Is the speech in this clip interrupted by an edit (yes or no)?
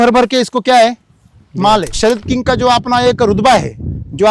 yes